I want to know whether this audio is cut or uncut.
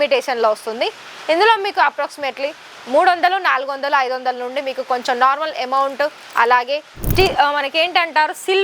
cut